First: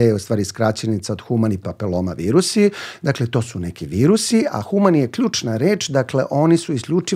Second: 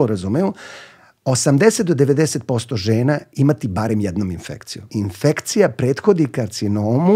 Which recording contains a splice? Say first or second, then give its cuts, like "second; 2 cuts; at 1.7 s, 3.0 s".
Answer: second; 1 cut; at 4.8 s